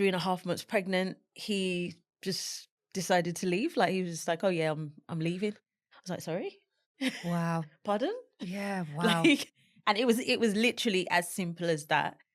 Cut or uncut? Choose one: uncut